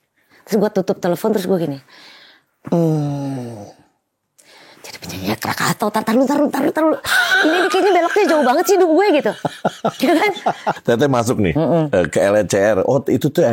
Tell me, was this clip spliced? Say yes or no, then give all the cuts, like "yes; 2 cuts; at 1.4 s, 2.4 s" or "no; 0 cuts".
yes; 1 cut; at 10.8 s